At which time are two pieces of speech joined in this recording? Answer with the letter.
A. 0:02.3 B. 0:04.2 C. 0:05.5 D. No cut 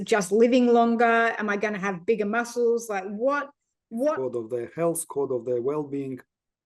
B